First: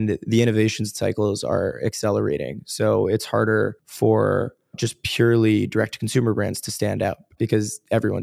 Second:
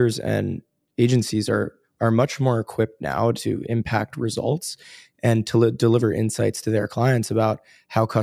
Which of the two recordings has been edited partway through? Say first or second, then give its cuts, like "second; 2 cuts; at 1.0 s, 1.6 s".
first; 3 cuts; at 3.8 s, 4.9 s, 7.3 s